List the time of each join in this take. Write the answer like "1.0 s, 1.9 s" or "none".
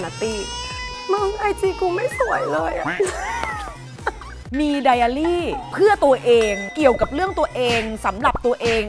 4.4 s